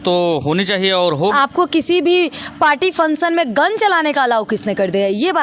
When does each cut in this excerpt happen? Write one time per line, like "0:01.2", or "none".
0:01.3